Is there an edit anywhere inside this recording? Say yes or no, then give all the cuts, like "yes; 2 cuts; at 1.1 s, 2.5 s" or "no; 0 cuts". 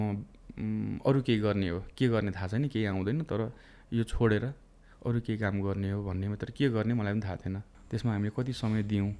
yes; 1 cut; at 7.7 s